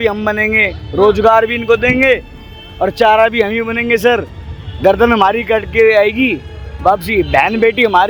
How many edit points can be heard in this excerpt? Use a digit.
0